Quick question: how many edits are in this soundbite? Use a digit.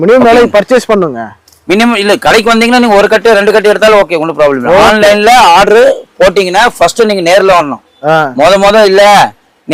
0